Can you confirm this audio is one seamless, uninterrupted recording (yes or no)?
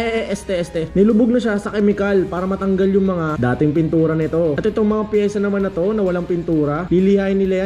yes